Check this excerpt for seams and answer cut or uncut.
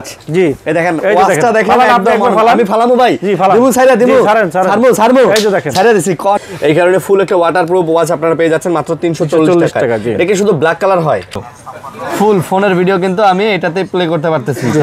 cut